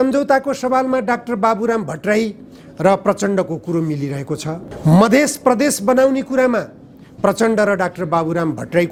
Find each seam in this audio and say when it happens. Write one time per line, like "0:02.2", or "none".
none